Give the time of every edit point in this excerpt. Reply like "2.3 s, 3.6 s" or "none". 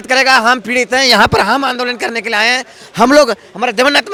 none